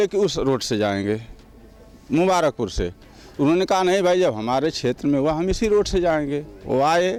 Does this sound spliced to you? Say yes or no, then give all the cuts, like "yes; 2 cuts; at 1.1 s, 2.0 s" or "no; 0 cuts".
no; 0 cuts